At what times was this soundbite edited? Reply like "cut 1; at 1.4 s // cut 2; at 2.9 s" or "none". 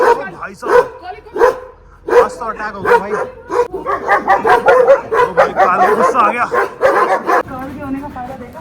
cut 1; at 3.7 s // cut 2; at 7.5 s